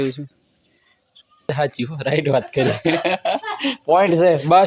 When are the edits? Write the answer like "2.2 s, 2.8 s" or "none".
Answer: 1.5 s